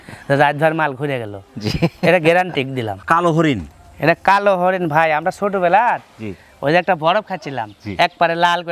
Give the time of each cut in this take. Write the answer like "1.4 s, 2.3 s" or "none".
3.0 s

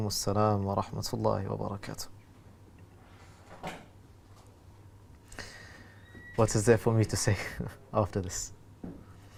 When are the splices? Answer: none

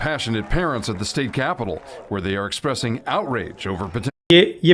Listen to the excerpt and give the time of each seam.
none

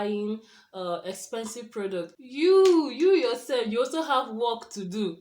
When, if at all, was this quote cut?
2.2 s

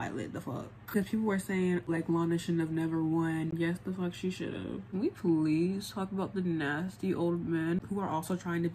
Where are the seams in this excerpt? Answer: 0.9 s, 1.9 s, 3.5 s, 4.9 s

